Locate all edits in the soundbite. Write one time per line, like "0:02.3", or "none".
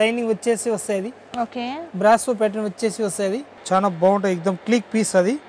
0:03.5